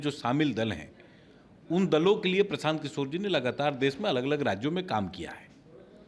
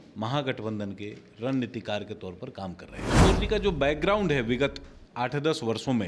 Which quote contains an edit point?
second; 1 cut; at 3.2 s

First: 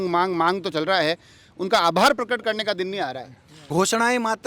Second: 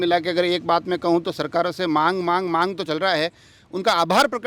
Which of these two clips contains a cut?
first; 1 cut; at 3.5 s

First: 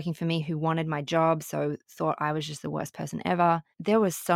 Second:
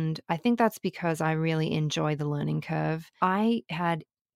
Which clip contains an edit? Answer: second; 1 cut; at 3.1 s

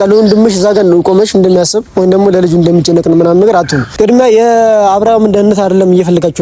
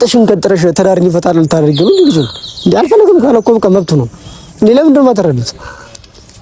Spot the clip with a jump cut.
first; 1 cut; at 3.9 s

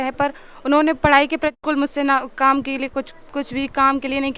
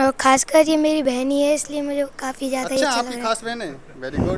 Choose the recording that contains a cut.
first; 1 cut; at 1.6 s

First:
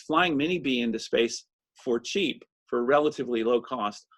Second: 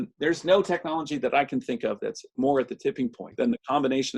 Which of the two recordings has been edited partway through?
second; 1 cut; at 3.2 s

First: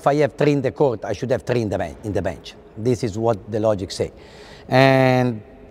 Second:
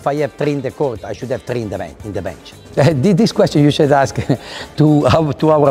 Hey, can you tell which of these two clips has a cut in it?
second; 1 cut; at 2.6 s

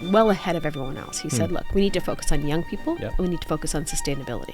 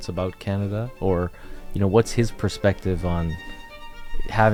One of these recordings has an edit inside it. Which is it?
first; 1 cut; at 3.1 s

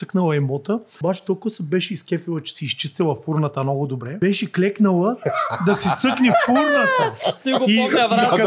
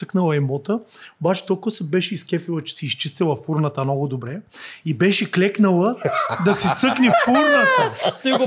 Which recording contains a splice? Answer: first; 2 cuts; at 0.9 s, 4.2 s

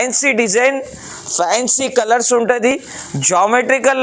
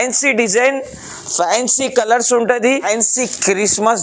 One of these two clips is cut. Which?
second; 1 cut; at 2.8 s

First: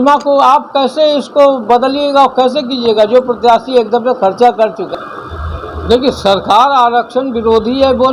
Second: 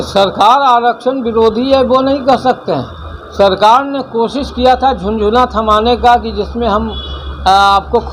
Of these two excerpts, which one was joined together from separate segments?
first; 1 cut; at 4.9 s

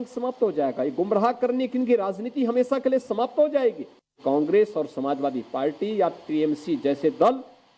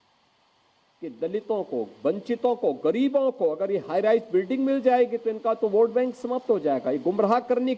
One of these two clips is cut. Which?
first; 1 cut; at 4.2 s

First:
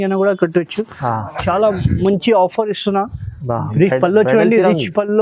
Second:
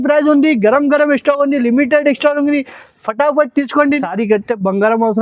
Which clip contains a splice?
second; 1 cut; at 4.0 s

